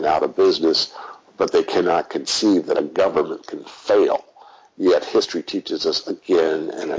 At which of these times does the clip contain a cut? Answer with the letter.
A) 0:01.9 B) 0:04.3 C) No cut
C